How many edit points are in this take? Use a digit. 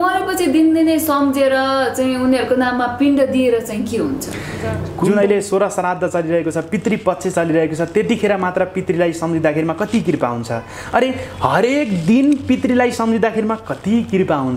1